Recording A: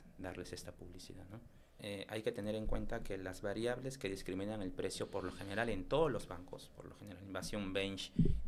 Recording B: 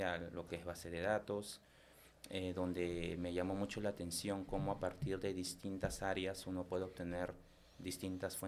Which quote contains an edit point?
A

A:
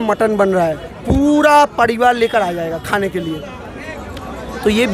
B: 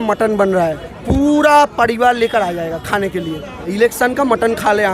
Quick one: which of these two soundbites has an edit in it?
B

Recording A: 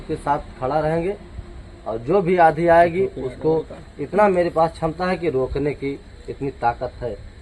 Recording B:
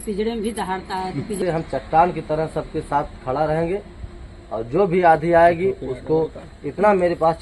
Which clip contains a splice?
B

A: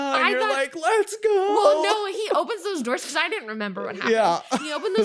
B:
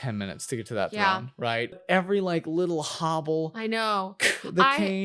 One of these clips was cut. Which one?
B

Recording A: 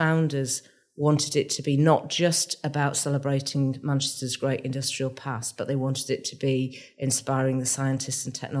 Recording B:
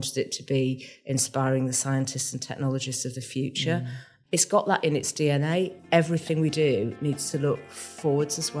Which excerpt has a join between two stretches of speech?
B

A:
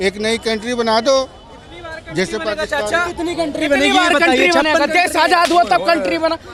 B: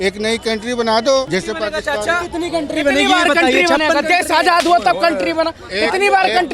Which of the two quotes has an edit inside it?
B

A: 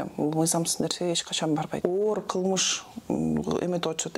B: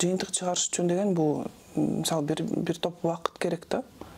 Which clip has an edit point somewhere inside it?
A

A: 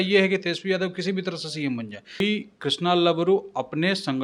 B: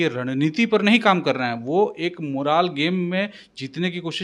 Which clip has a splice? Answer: A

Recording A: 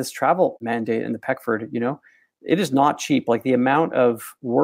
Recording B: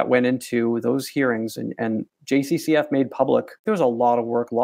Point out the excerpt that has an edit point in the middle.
B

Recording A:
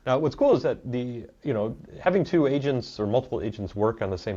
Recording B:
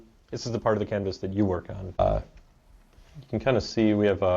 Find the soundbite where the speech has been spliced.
B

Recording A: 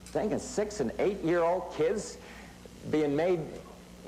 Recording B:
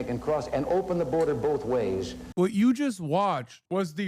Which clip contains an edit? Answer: B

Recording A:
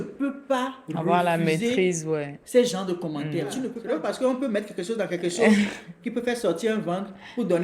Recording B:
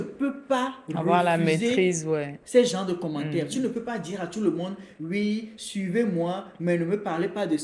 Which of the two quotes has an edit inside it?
A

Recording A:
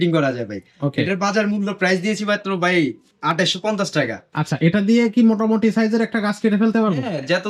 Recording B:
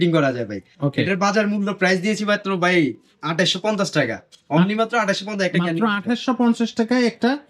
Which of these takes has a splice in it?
A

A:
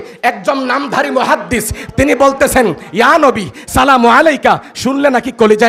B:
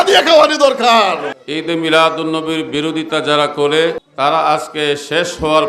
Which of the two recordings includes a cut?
B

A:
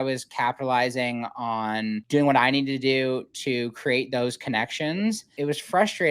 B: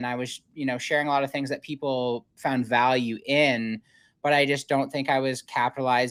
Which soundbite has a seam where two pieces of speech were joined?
A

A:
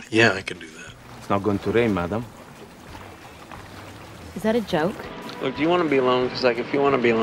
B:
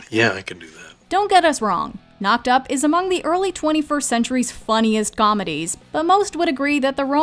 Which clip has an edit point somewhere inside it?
A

